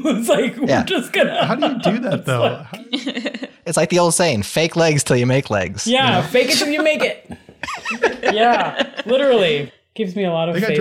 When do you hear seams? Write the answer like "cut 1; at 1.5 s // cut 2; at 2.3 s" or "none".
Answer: none